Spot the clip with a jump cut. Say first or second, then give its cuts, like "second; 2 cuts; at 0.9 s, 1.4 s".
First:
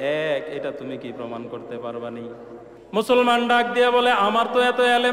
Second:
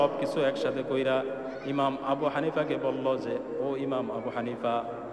first; 1 cut; at 2.7 s